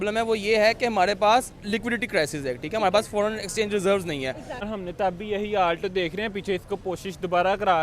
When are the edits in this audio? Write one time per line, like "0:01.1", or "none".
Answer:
0:04.6